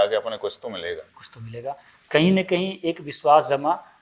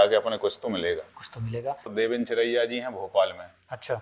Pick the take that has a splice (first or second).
second